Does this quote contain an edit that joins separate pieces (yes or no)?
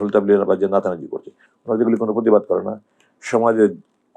no